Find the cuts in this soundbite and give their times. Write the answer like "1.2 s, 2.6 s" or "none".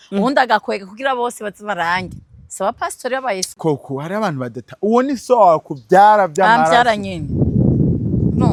none

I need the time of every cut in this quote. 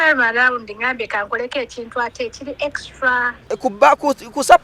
3.4 s

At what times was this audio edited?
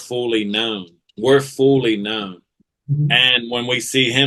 none

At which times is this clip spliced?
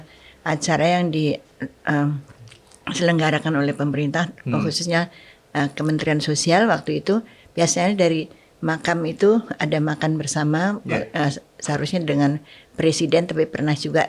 none

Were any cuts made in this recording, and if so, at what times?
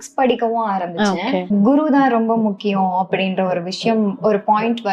1.5 s

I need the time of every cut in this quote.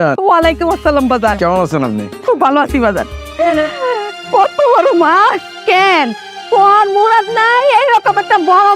3.2 s, 5.5 s

